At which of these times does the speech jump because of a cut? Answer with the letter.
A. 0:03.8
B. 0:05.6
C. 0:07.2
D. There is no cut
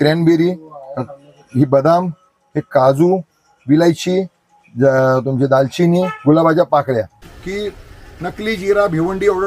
C